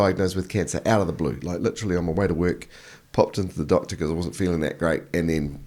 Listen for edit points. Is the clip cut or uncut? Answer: uncut